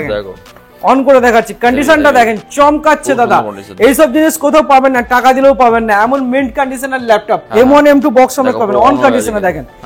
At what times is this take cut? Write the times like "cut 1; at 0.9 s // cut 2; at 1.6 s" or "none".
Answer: cut 1; at 7.4 s